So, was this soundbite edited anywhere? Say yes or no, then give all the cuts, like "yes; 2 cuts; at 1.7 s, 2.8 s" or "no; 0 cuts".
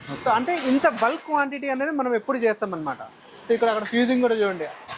no; 0 cuts